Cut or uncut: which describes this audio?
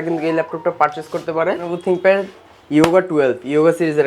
cut